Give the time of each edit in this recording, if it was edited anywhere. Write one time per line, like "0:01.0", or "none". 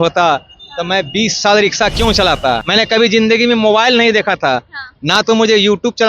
0:02.6